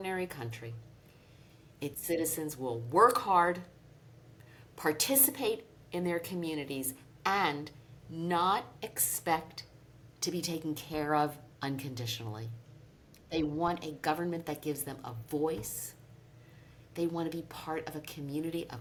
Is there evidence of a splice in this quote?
no; 0 cuts

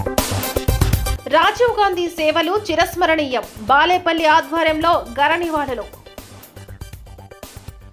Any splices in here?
no; 0 cuts

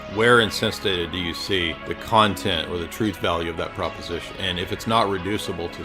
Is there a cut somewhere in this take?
yes; 2 cuts; at 1.9 s, 4.3 s

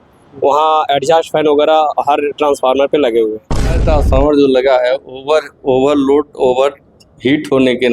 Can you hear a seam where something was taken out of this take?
yes; 1 cut; at 3.8 s

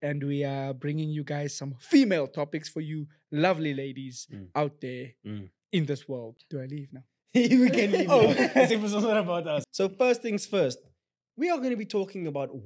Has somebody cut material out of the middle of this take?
yes; 2 cuts; at 6.3 s, 9.7 s

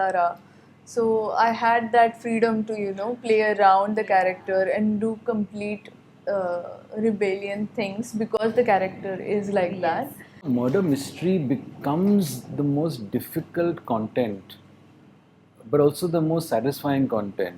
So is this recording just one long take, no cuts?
no; 1 cut; at 10.4 s

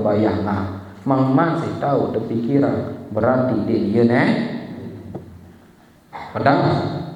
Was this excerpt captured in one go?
yes; 0 cuts

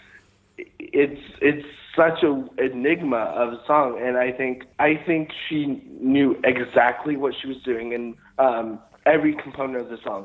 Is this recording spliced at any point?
yes; 1 cut; at 4.6 s

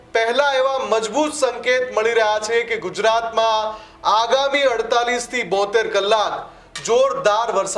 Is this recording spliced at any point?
no; 0 cuts

